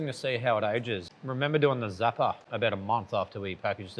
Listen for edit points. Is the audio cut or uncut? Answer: cut